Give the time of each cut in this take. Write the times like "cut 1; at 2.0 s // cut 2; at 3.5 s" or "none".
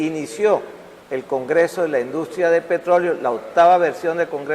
cut 1; at 2.4 s